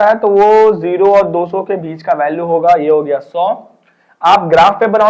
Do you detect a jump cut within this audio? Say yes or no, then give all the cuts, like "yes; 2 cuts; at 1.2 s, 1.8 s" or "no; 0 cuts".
no; 0 cuts